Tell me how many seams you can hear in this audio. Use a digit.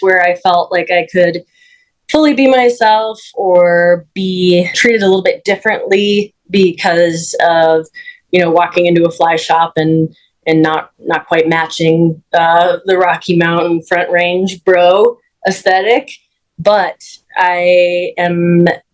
0